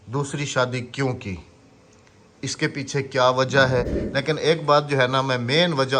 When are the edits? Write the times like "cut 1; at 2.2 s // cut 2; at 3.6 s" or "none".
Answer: cut 1; at 4.0 s